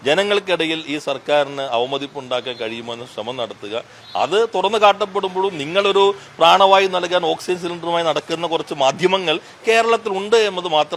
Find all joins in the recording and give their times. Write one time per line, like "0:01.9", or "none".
none